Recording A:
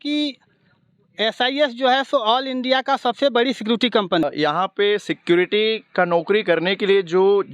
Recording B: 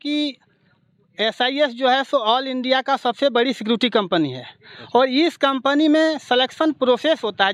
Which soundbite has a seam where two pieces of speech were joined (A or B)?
A